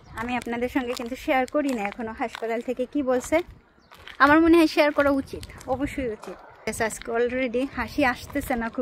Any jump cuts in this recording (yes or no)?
yes